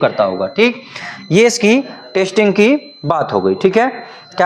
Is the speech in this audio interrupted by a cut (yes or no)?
no